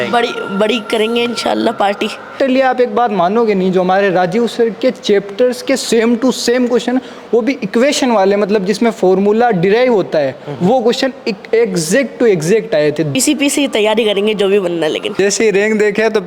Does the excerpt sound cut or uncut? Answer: cut